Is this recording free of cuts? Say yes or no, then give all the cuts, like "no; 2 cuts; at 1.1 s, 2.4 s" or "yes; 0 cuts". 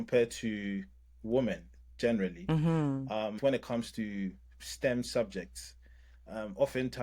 no; 1 cut; at 3.4 s